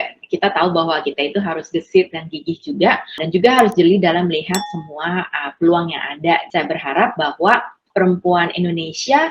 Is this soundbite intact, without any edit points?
no; 3 cuts; at 3.2 s, 6.5 s, 7.8 s

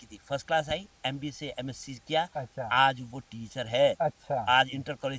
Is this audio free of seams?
yes; 0 cuts

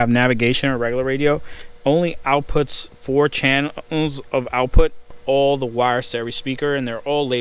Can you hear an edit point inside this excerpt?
yes; 1 cut; at 5.2 s

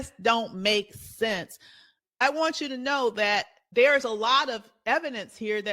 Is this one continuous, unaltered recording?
no; 2 cuts; at 3.6 s, 4.7 s

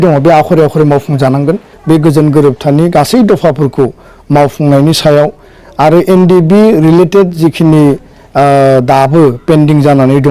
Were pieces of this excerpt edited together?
yes; 1 cut; at 1.7 s

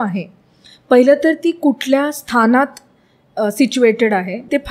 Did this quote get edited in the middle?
no; 0 cuts

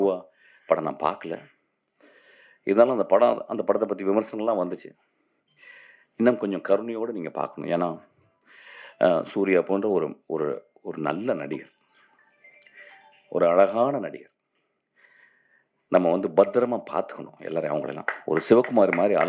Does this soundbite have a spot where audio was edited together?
no; 0 cuts

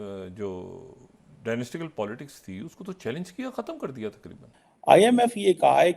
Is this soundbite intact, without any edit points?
no; 1 cut; at 4.6 s

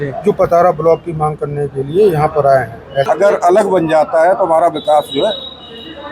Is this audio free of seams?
no; 1 cut; at 3.1 s

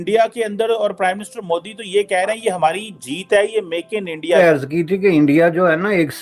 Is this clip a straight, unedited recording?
no; 1 cut; at 4.4 s

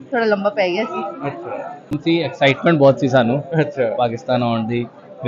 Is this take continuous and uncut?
no; 1 cut; at 2.0 s

